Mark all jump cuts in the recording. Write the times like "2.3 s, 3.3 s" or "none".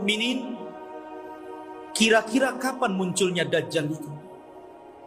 4.1 s